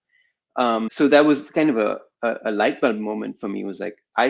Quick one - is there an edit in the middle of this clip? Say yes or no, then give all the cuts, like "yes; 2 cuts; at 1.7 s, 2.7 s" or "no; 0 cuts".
yes; 1 cut; at 0.9 s